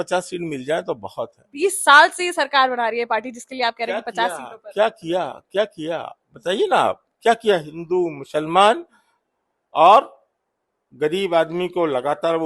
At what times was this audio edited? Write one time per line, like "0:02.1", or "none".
none